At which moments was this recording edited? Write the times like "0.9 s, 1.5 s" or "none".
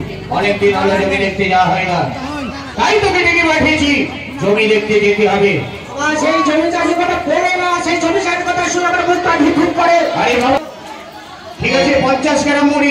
10.6 s